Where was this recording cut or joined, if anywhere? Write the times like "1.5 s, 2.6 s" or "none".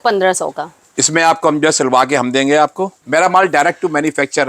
2.9 s